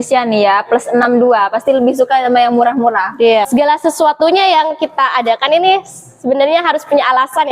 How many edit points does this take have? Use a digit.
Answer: 1